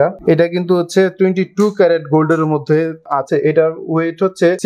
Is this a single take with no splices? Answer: no; 1 cut; at 3.3 s

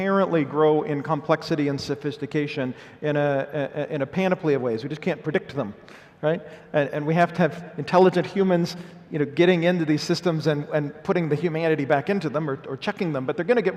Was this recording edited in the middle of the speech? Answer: no; 0 cuts

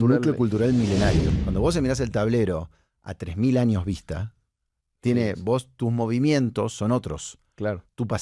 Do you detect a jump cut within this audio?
yes; 1 cut; at 1.3 s

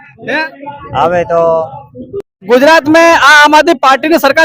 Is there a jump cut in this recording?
yes; 1 cut; at 2.4 s

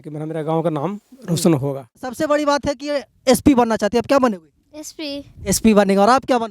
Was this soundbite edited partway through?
yes; 1 cut; at 2.1 s

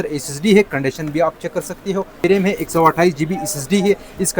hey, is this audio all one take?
no; 1 cut; at 2.2 s

